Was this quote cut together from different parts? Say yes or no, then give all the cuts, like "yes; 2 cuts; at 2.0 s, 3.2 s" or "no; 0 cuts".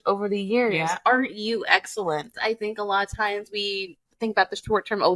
yes; 1 cut; at 2.3 s